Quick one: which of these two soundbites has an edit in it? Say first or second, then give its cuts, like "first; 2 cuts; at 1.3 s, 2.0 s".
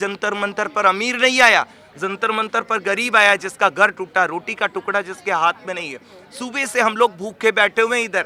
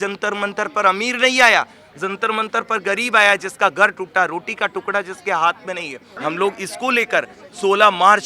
second; 1 cut; at 6.0 s